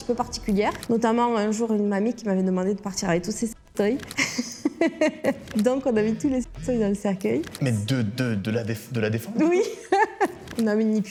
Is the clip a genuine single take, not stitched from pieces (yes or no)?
yes